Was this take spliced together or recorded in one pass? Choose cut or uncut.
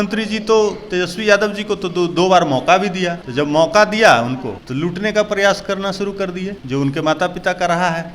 cut